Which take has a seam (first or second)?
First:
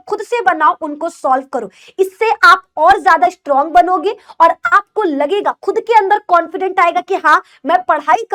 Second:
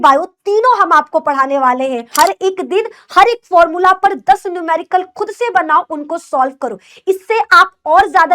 second